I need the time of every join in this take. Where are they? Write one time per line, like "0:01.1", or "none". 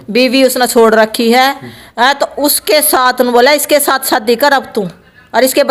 none